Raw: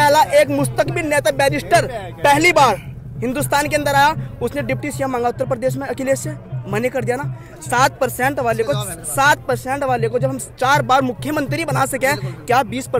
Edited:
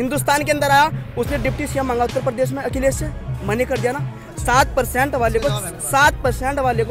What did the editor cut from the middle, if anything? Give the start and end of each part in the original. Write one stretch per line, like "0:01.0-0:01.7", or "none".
none